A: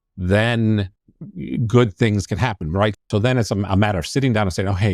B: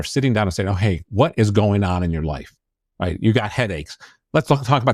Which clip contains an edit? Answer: A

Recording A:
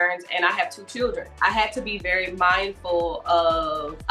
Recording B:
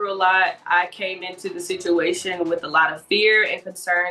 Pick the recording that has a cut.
A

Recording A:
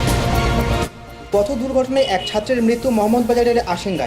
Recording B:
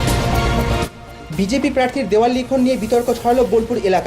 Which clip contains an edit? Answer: A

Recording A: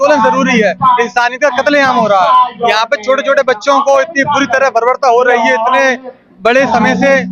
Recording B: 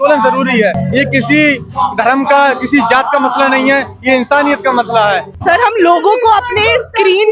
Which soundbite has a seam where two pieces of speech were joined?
B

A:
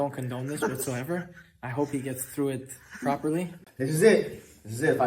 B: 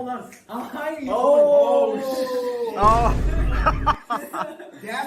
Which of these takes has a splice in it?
A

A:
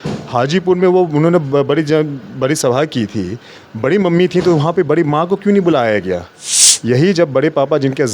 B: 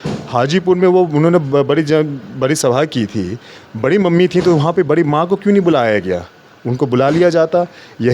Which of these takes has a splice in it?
A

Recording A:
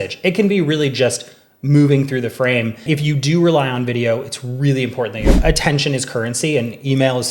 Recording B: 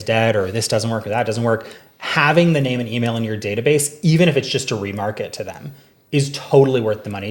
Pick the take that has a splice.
A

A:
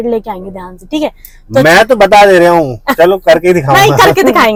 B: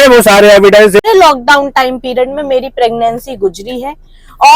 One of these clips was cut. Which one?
B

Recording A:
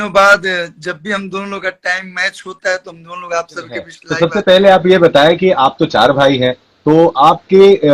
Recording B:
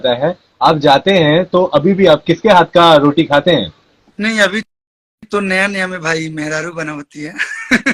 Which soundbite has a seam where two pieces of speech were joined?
A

